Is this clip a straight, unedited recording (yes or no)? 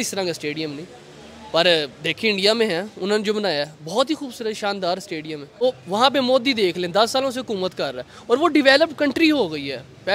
no